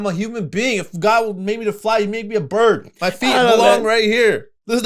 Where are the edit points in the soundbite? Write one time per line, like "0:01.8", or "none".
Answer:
0:02.9